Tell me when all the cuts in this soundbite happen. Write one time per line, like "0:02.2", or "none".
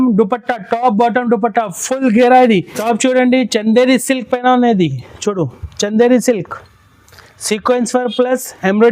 0:02.7